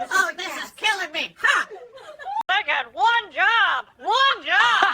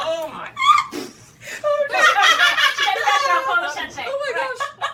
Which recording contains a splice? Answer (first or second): first